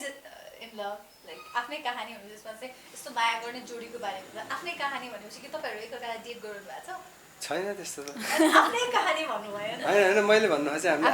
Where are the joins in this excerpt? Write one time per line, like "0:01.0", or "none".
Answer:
none